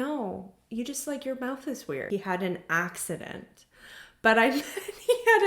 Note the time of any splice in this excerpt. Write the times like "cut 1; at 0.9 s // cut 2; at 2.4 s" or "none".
cut 1; at 2.1 s